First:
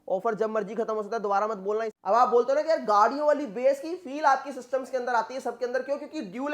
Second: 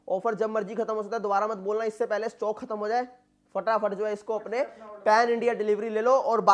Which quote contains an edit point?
first; 1 cut; at 1.9 s

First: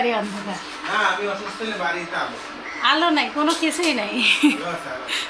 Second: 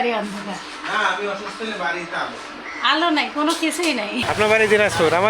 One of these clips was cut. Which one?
second; 1 cut; at 4.2 s

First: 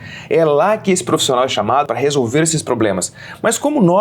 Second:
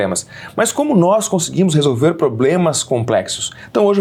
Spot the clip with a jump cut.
first; 1 cut; at 1.8 s

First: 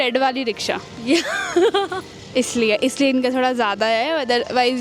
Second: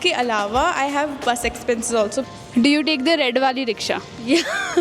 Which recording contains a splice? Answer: second; 1 cut; at 2.3 s

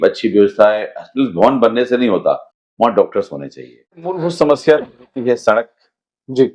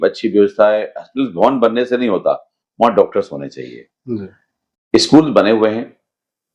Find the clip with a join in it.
first; 1 cut; at 4.1 s

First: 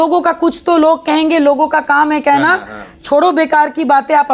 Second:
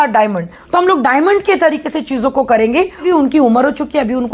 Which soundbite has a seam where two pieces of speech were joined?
second; 1 cut; at 3.0 s

